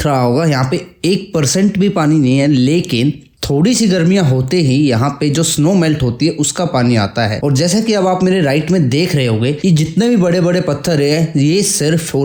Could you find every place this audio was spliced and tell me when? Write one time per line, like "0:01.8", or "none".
none